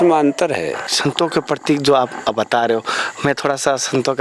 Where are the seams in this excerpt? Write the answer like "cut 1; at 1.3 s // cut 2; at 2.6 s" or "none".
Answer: cut 1; at 0.9 s